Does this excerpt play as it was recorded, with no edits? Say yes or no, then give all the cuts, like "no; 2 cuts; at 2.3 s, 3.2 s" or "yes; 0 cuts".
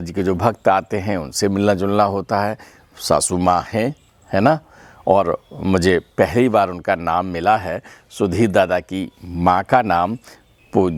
yes; 0 cuts